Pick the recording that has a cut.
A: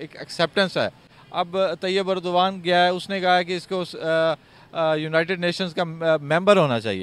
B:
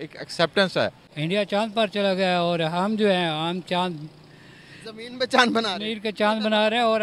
B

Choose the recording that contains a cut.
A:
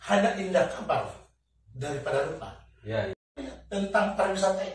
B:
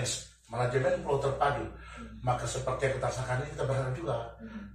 A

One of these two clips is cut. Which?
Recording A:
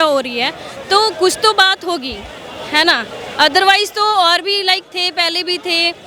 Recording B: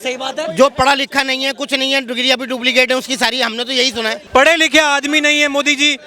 B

